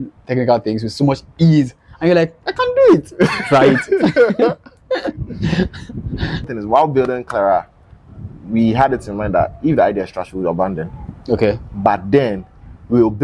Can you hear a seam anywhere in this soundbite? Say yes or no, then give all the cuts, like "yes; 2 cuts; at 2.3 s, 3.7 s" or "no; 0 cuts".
yes; 1 cut; at 6.6 s